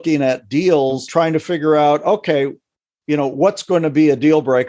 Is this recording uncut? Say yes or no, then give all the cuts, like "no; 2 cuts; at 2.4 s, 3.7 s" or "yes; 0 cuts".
no; 1 cut; at 1.0 s